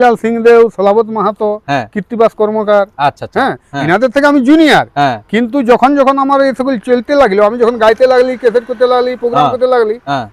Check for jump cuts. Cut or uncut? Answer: uncut